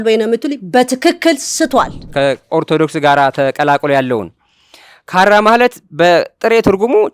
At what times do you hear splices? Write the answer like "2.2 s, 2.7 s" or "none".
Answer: 2.1 s